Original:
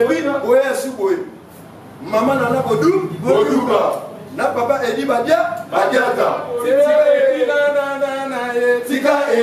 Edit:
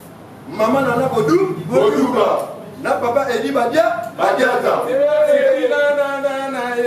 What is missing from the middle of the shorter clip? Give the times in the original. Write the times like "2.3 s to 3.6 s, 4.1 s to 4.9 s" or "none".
6.4 s to 6.6 s